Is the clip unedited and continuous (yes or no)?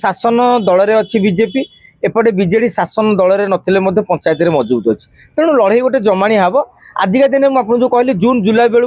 yes